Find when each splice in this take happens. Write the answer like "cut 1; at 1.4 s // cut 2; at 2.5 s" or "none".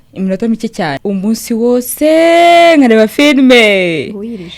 cut 1; at 1.0 s